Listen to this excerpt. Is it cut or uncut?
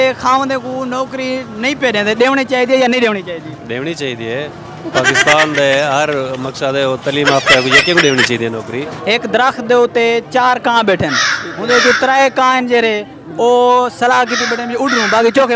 cut